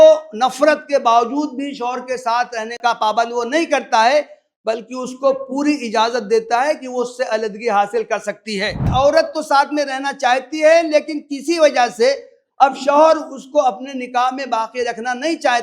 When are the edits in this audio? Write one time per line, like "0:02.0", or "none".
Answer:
0:02.8
0:08.8